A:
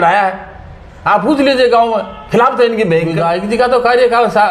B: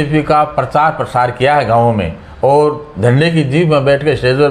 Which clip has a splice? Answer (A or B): A